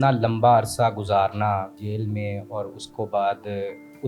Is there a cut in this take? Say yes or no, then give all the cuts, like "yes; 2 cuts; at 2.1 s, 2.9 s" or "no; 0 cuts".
yes; 1 cut; at 1.8 s